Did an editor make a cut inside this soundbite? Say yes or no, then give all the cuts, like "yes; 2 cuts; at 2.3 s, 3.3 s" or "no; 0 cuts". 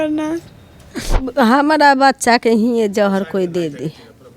yes; 1 cut; at 1.2 s